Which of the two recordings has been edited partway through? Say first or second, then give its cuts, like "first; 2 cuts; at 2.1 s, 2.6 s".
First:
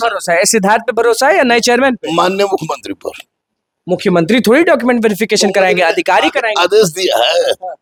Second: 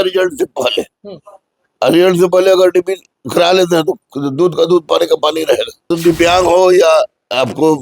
second; 1 cut; at 5.9 s